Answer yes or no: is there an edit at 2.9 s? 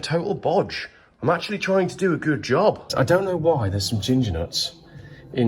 yes